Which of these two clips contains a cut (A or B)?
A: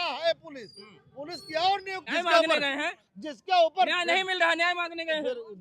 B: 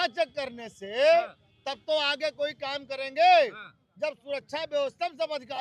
A